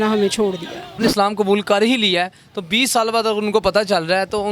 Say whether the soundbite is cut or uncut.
cut